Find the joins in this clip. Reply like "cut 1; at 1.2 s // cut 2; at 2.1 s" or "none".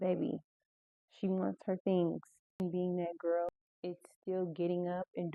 cut 1; at 2.6 s // cut 2; at 3.6 s